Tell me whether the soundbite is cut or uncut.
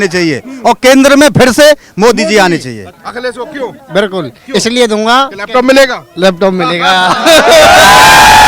cut